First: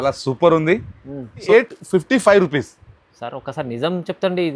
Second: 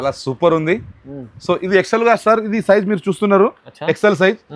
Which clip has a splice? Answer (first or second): first